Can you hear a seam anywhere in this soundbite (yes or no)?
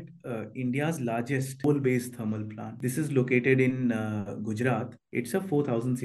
no